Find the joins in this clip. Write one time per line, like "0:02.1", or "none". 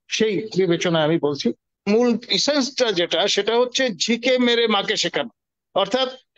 0:01.7